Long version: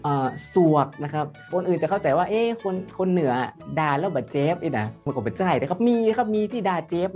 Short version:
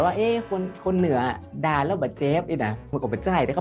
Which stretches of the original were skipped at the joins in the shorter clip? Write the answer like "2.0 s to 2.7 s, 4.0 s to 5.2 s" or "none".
none